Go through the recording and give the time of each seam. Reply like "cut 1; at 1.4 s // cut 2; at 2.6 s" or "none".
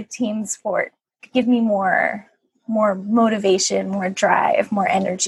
none

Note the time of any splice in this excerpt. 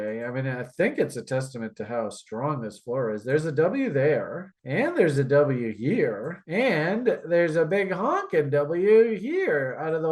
none

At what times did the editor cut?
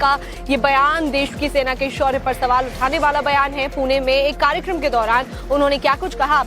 cut 1; at 3.7 s

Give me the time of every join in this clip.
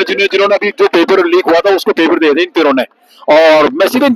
none

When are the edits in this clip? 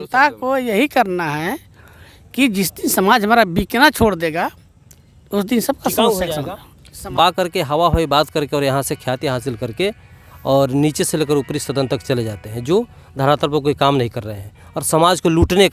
cut 1; at 7.2 s

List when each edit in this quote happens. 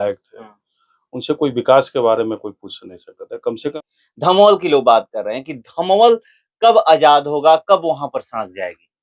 cut 1; at 3.6 s

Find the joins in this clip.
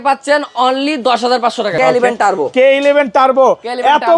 cut 1; at 1.7 s

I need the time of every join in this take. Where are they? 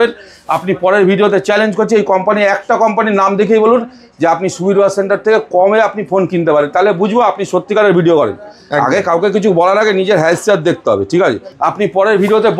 cut 1; at 11.5 s

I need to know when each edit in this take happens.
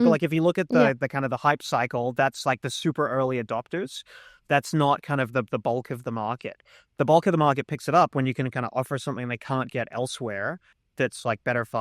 cut 1; at 10.9 s

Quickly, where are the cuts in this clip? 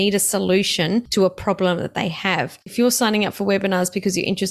cut 1; at 1.1 s // cut 2; at 2.7 s

